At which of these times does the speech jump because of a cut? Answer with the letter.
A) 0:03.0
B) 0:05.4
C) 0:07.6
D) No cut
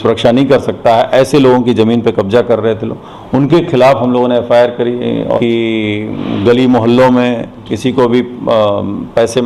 B